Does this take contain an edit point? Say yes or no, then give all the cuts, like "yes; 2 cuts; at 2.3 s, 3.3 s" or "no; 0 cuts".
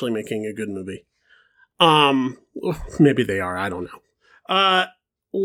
no; 0 cuts